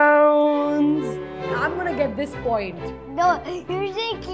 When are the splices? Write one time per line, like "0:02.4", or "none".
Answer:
0:01.5